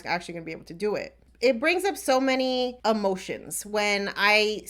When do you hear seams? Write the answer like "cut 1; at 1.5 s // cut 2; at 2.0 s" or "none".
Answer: cut 1; at 1.2 s // cut 2; at 2.8 s